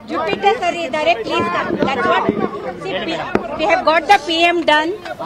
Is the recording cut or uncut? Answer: uncut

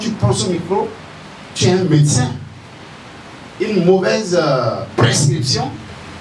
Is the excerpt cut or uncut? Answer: uncut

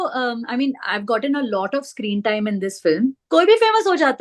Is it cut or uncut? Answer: cut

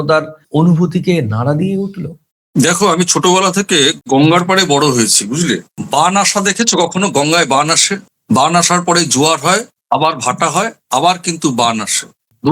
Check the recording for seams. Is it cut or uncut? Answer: uncut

